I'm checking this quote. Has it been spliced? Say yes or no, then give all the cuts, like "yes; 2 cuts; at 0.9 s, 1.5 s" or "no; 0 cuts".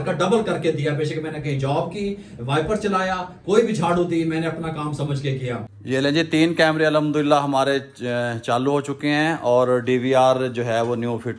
yes; 1 cut; at 5.7 s